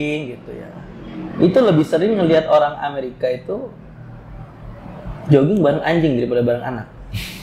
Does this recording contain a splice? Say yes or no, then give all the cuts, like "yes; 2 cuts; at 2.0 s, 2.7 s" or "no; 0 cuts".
no; 0 cuts